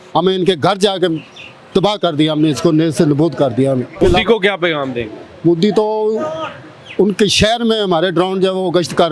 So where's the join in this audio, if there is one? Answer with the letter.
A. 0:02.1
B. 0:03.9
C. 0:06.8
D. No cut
B